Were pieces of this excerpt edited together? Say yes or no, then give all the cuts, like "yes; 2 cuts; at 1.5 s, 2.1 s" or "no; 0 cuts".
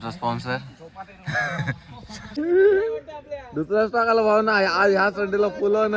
yes; 1 cut; at 2.4 s